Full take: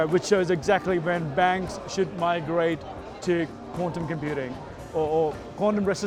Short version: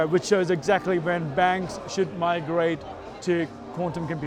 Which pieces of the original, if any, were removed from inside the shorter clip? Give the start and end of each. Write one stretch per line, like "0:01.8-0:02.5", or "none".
none